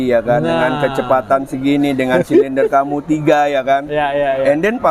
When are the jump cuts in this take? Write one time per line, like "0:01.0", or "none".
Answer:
none